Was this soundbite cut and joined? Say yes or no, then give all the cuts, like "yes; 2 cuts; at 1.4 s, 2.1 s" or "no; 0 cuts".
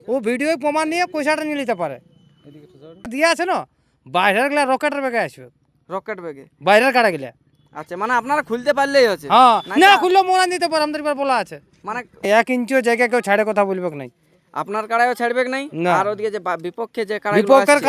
yes; 2 cuts; at 3.1 s, 12.2 s